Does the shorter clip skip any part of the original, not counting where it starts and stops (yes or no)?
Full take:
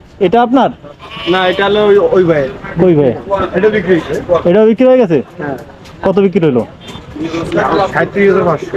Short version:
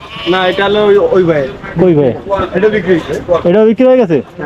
no